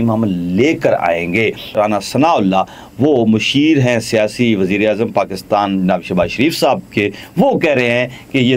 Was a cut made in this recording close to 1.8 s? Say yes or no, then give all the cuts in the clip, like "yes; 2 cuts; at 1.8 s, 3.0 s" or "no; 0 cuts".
yes; 1 cut; at 1.8 s